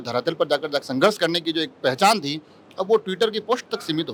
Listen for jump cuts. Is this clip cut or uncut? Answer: uncut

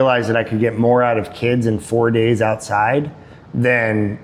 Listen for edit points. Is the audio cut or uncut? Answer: uncut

